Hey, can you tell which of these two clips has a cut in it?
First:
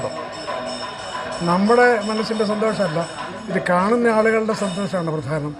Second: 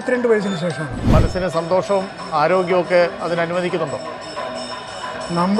second; 1 cut; at 1.0 s

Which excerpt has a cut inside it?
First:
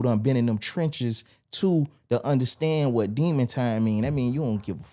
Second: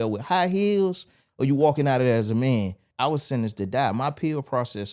second; 1 cut; at 2.8 s

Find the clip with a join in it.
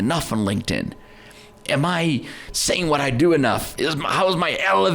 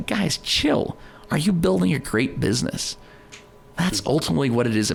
first; 1 cut; at 2.5 s

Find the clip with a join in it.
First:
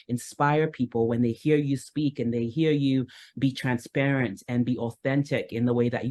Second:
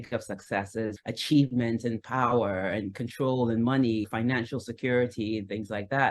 second; 2 cuts; at 0.9 s, 4.1 s

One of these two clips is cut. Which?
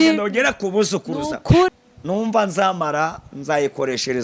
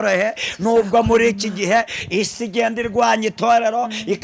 first; 1 cut; at 1.7 s

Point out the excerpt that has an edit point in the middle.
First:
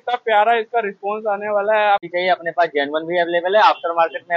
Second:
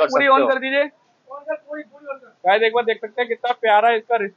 first; 1 cut; at 2.0 s

